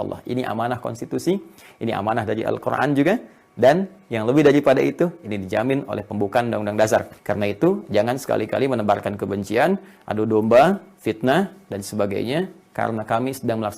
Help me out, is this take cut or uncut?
cut